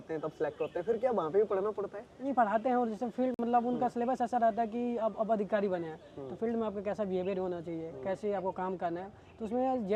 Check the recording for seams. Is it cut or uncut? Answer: uncut